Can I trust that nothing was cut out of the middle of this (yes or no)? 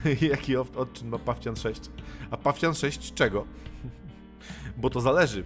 yes